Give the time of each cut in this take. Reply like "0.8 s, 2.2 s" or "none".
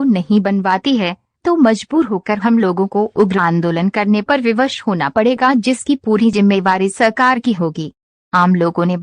2.6 s